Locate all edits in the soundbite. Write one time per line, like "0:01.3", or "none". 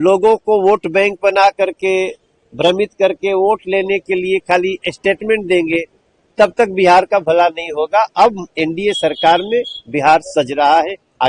none

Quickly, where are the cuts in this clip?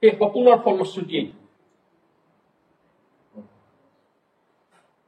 none

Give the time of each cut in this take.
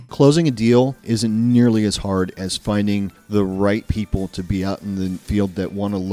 0:01.0
0:03.2
0:05.2

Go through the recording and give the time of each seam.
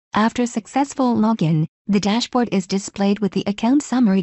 0:00.9

